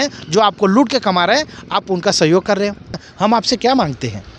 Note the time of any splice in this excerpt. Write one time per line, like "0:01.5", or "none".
0:03.0